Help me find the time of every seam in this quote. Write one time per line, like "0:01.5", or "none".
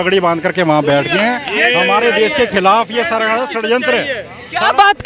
none